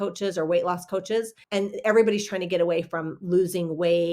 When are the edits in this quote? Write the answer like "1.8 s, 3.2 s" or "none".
1.4 s